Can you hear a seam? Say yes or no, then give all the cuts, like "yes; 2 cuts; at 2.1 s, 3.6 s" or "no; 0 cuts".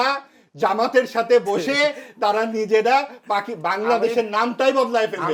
no; 0 cuts